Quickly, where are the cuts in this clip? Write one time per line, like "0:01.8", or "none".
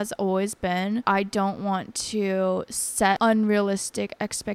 0:01.0
0:03.2

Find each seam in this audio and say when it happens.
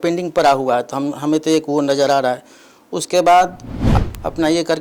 0:03.9

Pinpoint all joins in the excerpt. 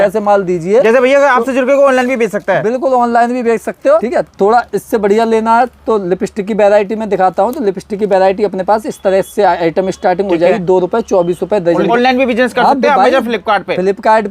0:04.0
0:11.9

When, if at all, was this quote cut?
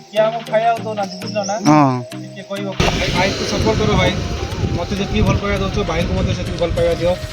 0:02.9

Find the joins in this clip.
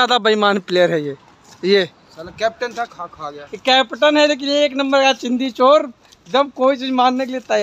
none

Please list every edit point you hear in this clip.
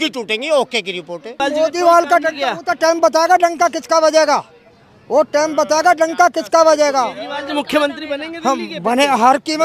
0:01.4

